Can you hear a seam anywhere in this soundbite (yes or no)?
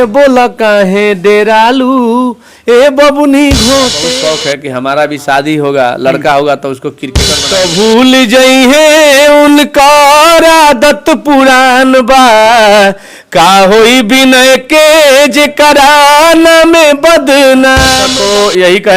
yes